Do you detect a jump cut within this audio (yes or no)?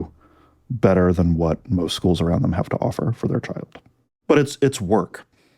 yes